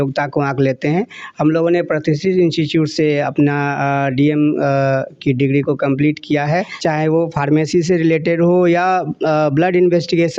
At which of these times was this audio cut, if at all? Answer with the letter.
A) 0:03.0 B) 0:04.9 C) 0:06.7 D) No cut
C